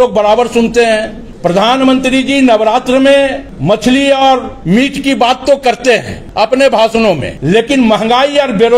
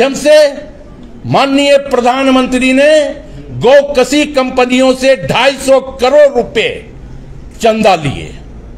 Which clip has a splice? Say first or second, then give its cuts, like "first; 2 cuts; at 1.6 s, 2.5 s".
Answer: first; 5 cuts; at 1.2 s, 3.5 s, 4.5 s, 6.2 s, 7.3 s